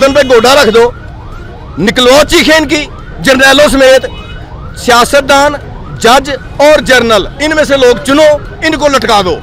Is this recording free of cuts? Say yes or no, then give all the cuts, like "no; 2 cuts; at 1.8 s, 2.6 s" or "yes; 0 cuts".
yes; 0 cuts